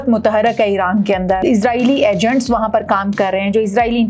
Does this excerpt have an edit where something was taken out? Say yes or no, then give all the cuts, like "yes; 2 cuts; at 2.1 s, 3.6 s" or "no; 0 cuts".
yes; 1 cut; at 1.4 s